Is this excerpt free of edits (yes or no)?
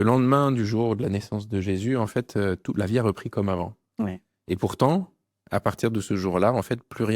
yes